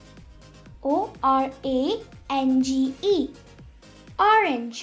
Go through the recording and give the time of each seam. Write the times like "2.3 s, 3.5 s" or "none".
none